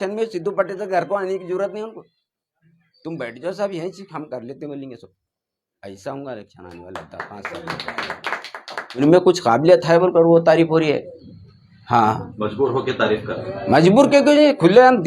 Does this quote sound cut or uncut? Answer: cut